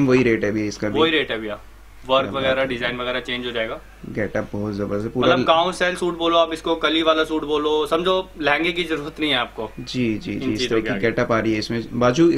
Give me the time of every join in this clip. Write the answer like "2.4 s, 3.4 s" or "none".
none